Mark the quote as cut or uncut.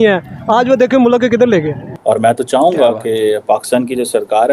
cut